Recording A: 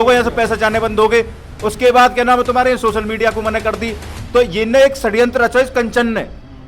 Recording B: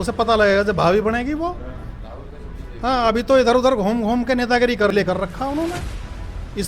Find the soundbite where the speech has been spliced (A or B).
B